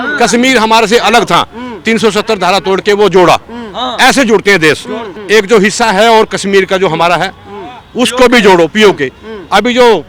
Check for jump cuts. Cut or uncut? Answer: cut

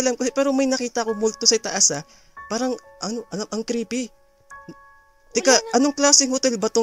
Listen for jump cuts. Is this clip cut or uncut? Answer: uncut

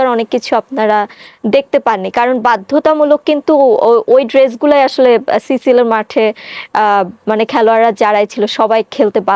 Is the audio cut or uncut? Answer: uncut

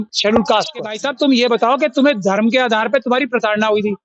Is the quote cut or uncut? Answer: cut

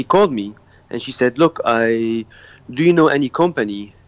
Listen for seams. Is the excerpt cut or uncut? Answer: uncut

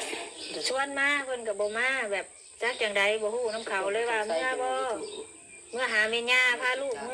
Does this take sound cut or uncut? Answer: uncut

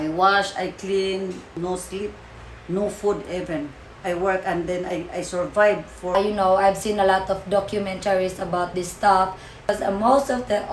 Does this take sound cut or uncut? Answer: cut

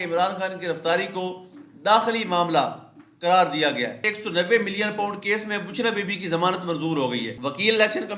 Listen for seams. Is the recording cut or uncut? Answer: cut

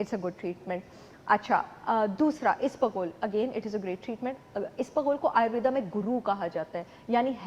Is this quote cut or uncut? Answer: uncut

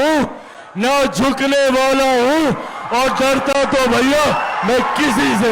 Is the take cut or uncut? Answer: uncut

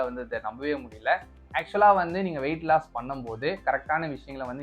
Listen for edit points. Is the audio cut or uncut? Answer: uncut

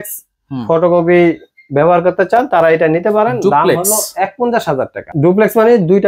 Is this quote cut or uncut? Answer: cut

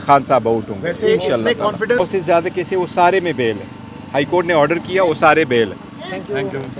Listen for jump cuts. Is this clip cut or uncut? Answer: cut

